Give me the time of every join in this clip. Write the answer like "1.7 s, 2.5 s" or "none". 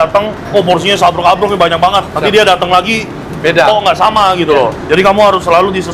none